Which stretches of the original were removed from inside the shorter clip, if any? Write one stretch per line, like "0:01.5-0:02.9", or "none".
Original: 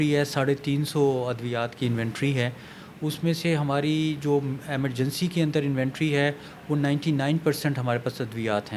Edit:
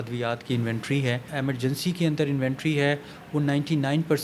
0:02.6-0:04.6